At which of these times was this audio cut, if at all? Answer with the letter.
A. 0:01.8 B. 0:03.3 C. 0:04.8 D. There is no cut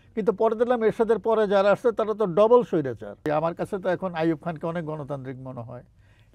B